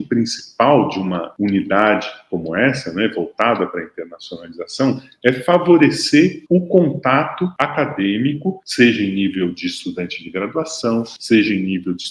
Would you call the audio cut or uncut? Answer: uncut